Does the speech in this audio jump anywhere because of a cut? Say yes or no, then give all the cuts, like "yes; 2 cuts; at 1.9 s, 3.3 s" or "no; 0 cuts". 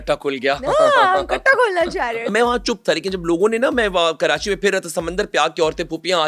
yes; 1 cut; at 2.3 s